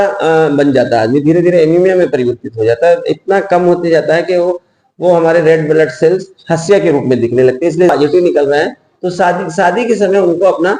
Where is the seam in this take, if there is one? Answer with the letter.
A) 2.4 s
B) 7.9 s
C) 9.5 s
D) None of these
B